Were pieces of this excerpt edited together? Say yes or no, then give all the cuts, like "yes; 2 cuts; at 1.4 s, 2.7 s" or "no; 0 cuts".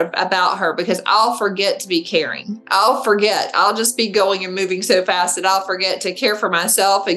no; 0 cuts